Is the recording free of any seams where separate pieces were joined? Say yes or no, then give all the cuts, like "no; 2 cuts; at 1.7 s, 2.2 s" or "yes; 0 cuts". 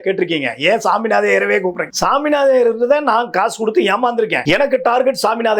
no; 2 cuts; at 1.9 s, 4.4 s